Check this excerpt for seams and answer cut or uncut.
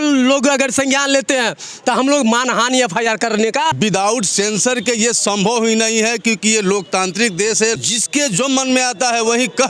cut